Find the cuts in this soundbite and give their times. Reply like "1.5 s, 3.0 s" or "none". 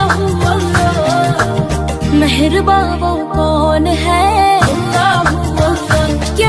none